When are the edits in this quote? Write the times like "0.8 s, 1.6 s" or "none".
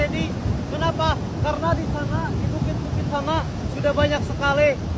none